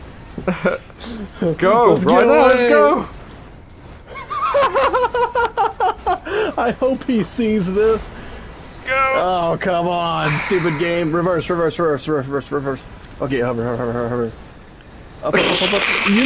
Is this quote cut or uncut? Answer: uncut